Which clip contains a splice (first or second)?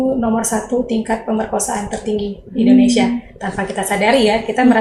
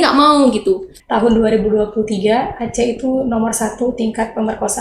second